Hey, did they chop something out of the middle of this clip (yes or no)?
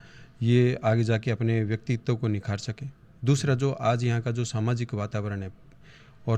no